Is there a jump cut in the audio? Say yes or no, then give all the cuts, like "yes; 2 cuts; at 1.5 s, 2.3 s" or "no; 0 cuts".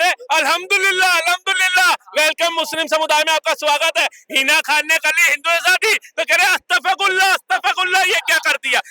no; 0 cuts